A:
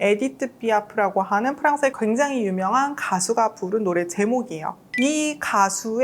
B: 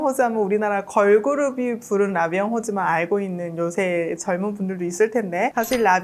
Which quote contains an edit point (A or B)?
A